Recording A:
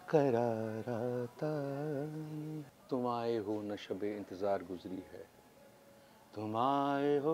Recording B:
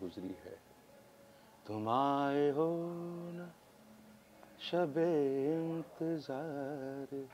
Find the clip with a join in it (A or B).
A